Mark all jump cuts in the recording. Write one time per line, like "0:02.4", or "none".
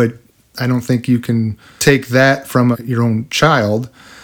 0:01.6
0:02.8

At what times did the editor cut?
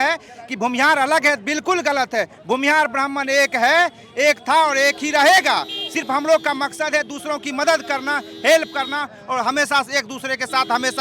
none

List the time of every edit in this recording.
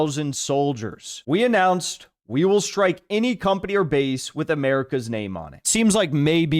0:01.1
0:05.6

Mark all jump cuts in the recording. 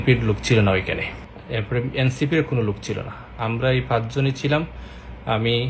none

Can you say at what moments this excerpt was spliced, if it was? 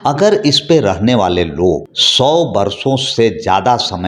0:02.0

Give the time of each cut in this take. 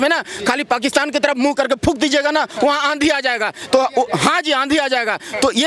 none

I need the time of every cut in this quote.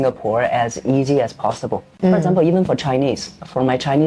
0:01.9

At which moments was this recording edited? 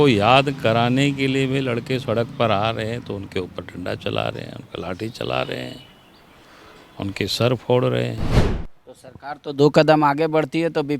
0:08.5

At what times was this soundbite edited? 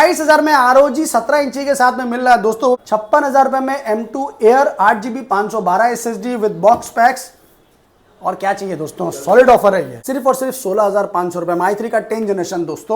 0:02.8
0:10.0

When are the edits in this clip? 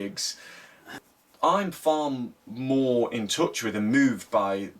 0:00.9

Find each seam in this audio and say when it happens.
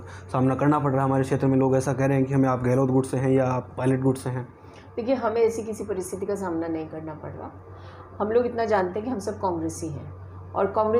none

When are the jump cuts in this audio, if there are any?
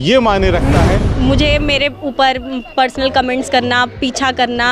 0:01.1

